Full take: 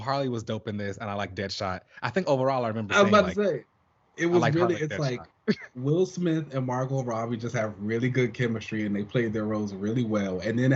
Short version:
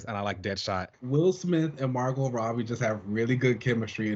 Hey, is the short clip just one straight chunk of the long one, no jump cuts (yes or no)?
no